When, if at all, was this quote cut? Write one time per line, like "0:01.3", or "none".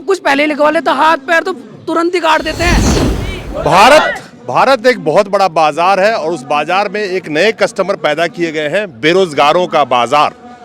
0:02.9